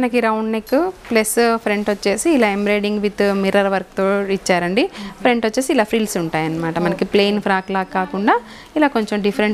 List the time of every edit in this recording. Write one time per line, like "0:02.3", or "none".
none